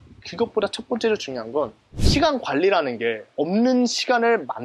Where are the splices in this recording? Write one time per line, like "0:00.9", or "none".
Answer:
0:01.8